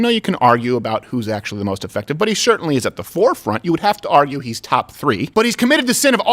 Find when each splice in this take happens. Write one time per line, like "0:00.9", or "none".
0:05.3